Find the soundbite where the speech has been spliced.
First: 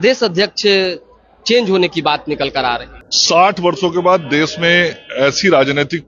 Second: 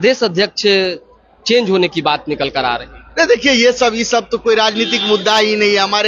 first; 1 cut; at 3.0 s

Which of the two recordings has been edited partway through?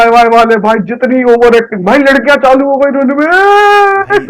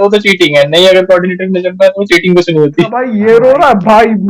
second; 1 cut; at 3.1 s

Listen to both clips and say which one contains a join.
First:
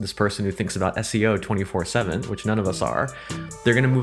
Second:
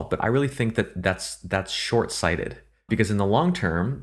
second; 1 cut; at 2.9 s

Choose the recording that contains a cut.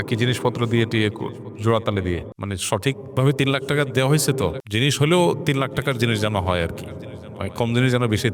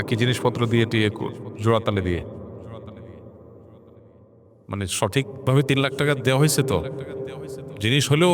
first; 2 cuts; at 2.3 s, 4.6 s

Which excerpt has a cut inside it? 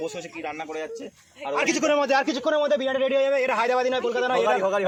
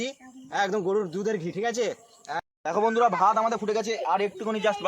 second; 1 cut; at 2.4 s

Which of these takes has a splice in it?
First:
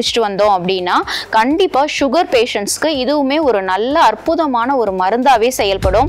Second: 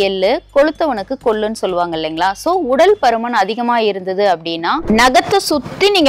second; 1 cut; at 4.7 s

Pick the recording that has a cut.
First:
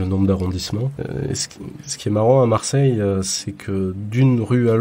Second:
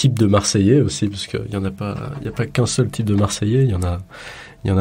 first; 1 cut; at 1.0 s

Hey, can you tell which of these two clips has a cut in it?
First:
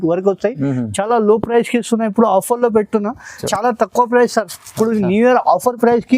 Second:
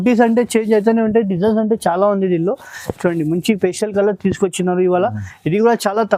first; 1 cut; at 3.5 s

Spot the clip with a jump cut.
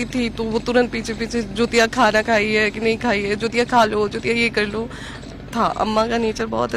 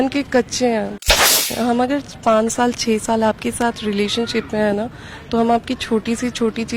second; 1 cut; at 1.0 s

